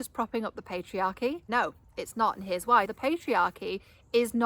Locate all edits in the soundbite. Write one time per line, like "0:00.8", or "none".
0:01.4
0:02.9